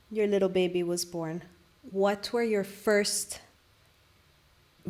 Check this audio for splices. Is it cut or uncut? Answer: uncut